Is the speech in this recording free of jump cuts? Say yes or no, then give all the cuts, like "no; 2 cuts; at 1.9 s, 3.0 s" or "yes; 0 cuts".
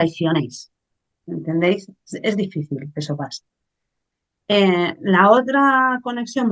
yes; 0 cuts